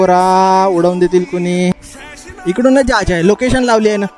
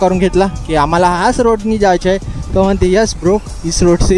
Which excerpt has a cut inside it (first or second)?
first